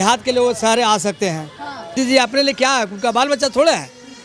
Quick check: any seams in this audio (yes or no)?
yes